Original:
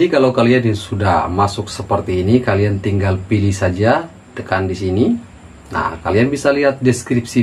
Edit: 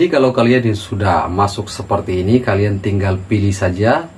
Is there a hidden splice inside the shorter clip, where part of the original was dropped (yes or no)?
no